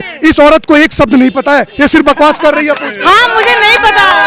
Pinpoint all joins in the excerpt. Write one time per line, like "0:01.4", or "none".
none